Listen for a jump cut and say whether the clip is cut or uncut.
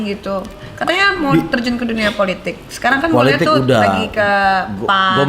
uncut